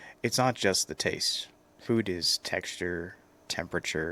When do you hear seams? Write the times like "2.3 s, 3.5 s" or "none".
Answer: none

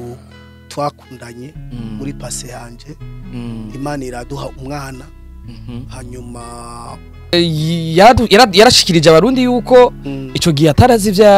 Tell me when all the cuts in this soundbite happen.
7.3 s

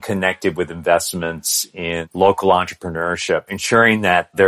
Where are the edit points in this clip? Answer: 2.1 s, 3.5 s

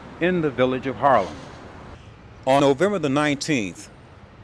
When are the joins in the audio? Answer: 2.6 s

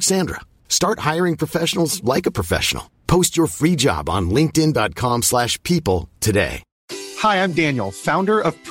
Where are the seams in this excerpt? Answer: 6.7 s

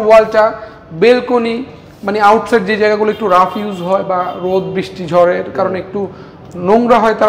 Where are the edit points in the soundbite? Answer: none

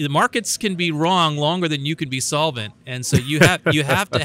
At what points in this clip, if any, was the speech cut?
none

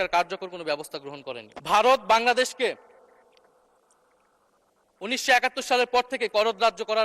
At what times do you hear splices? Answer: 1.5 s

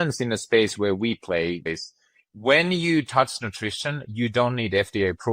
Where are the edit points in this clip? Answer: 1.7 s

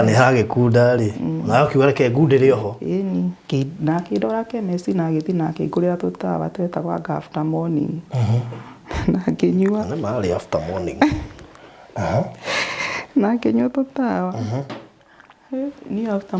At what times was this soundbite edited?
3.4 s

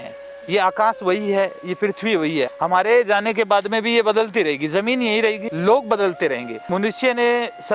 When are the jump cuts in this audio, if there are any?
2.5 s, 5.5 s, 6.6 s

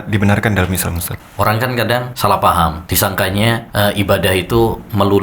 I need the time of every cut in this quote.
1.1 s, 2.1 s, 2.8 s, 3.7 s

